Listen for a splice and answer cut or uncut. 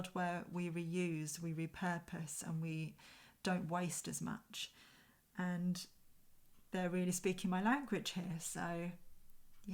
uncut